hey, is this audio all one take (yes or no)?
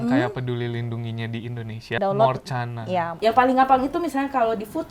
no